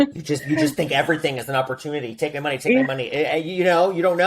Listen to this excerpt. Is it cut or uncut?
uncut